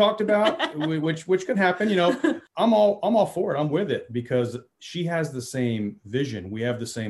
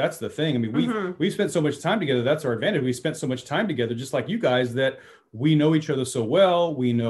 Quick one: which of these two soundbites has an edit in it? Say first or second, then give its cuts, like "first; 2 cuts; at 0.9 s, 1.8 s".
first; 1 cut; at 2.4 s